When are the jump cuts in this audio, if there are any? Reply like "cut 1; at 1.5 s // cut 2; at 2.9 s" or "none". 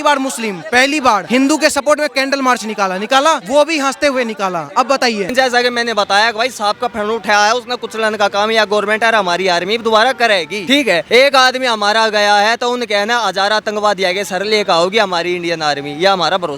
cut 1; at 1.2 s // cut 2; at 3.4 s // cut 3; at 5.3 s // cut 4; at 10.9 s